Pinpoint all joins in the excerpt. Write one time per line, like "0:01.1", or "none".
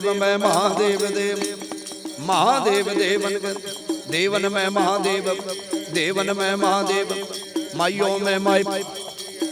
none

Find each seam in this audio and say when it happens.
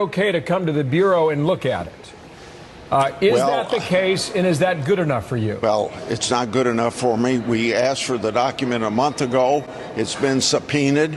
0:05.6

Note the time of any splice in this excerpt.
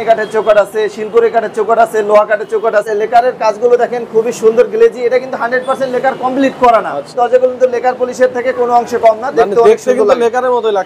0:02.9
0:07.1

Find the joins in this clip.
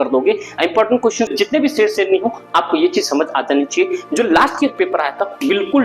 0:01.3

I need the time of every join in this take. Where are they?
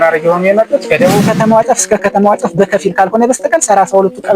0:01.2

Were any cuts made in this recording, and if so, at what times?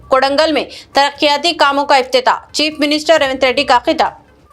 none

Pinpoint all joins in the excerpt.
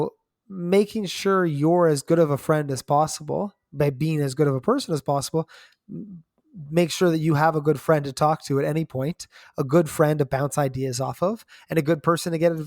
none

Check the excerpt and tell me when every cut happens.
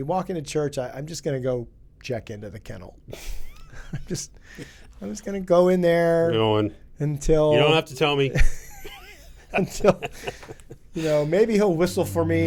none

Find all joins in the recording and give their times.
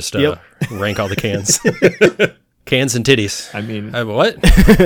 0:02.5

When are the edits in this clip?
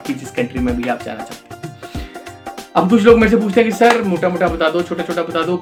none

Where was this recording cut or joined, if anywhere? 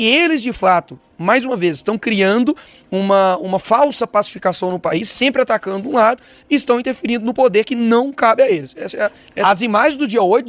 0:09.3

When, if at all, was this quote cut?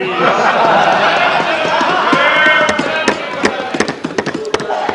none

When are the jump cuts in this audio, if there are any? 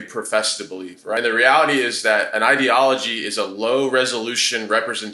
0:01.2

